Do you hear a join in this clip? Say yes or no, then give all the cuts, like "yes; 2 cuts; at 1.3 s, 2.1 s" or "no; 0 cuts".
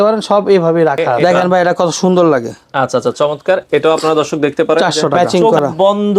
yes; 2 cuts; at 1.2 s, 5.3 s